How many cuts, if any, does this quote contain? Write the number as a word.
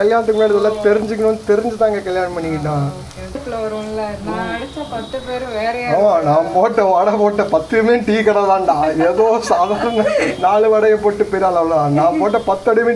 one